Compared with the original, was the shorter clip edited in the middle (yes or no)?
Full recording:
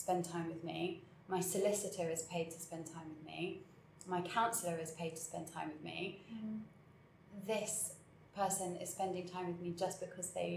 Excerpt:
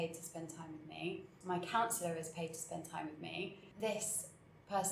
yes